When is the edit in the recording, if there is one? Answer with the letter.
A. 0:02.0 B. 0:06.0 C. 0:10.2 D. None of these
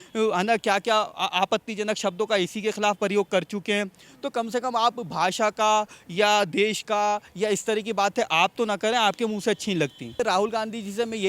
C